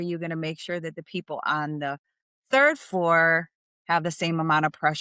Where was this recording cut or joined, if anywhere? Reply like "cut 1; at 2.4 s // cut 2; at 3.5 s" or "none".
none